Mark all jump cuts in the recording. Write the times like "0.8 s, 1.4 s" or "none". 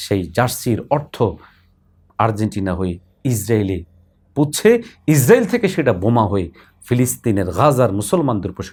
none